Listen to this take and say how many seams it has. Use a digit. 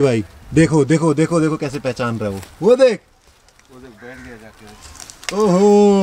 0